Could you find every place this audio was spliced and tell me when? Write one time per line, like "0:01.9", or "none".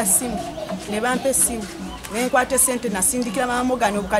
none